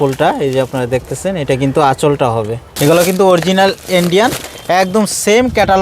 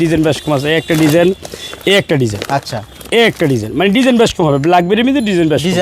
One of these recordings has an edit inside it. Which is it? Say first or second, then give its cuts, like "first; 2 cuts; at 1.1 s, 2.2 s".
first; 1 cut; at 2.7 s